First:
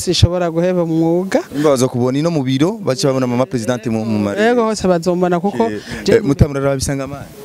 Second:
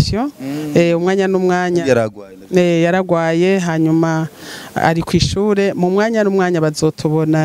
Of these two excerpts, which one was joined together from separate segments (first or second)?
first